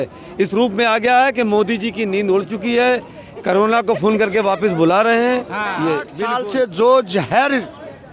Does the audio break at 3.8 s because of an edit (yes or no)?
no